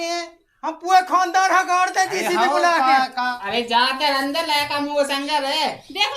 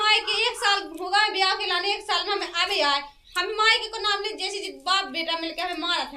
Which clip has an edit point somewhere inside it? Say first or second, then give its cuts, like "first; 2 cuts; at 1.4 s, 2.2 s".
first; 1 cut; at 3.3 s